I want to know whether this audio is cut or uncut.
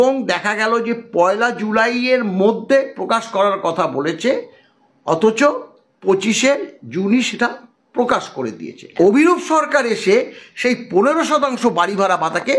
cut